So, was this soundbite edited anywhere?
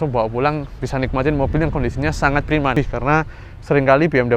yes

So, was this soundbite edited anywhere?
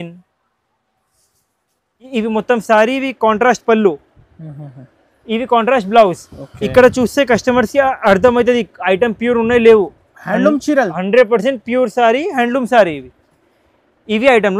yes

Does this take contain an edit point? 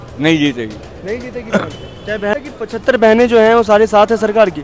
yes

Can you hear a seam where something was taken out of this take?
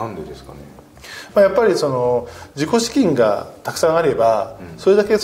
no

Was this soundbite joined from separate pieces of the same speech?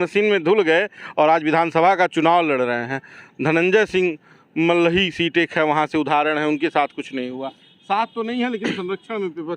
no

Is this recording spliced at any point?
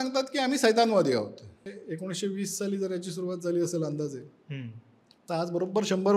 yes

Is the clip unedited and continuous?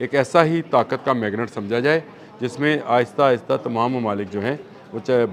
yes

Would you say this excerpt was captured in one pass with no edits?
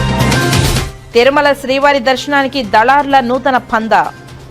no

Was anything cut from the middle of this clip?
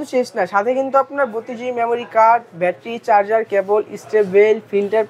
no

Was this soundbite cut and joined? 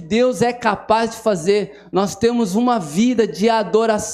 no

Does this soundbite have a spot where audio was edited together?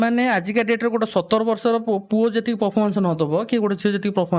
no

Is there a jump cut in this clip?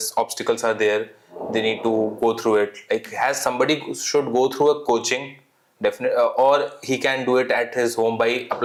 no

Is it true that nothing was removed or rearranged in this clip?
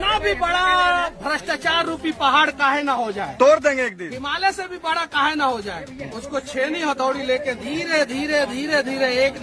yes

